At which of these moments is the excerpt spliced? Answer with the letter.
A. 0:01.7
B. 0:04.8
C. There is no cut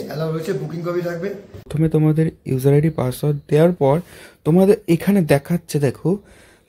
A